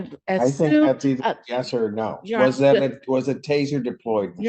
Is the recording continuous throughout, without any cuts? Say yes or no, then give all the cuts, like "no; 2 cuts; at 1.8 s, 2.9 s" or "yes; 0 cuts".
yes; 0 cuts